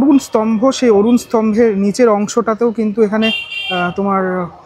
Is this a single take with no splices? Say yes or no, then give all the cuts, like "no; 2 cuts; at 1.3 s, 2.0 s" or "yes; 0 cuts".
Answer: yes; 0 cuts